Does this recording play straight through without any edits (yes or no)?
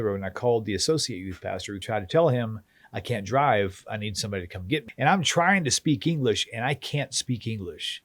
no